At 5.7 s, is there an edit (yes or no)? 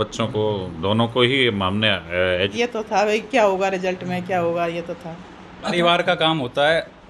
yes